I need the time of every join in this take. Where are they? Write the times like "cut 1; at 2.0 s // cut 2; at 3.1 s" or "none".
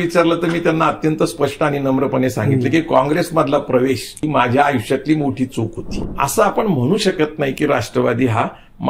cut 1; at 4.2 s // cut 2; at 5.8 s